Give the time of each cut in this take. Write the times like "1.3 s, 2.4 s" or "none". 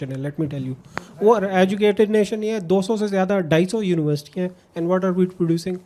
none